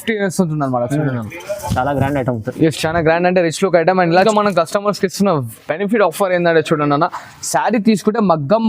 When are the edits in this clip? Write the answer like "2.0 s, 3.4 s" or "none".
4.2 s